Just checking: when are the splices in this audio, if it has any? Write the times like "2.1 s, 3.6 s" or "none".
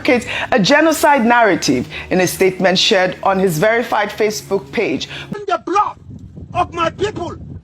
5.1 s